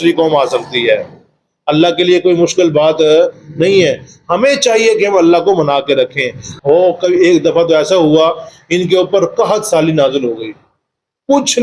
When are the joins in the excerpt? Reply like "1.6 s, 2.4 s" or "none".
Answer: 6.4 s